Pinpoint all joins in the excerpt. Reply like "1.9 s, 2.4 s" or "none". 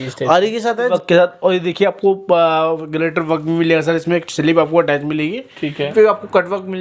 0.9 s, 5.9 s